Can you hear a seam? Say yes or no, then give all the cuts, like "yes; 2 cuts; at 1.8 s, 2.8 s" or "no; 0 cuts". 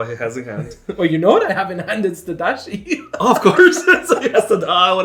no; 0 cuts